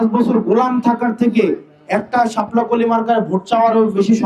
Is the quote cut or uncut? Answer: uncut